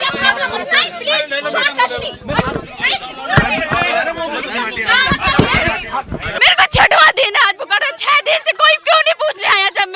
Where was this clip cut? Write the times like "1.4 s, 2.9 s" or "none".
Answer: 6.2 s